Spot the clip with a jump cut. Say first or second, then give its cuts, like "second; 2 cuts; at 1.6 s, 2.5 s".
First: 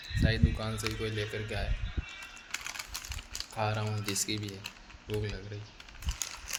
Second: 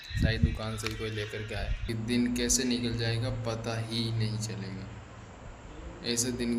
second; 1 cut; at 1.8 s